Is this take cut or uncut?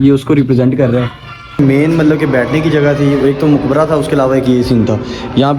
cut